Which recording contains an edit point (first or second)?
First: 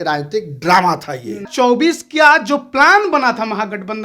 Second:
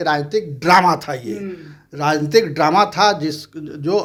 first